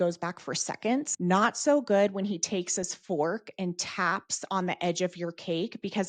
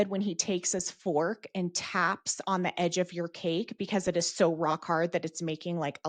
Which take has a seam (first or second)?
first